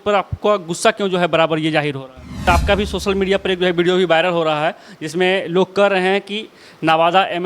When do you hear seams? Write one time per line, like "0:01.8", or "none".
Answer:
0:02.4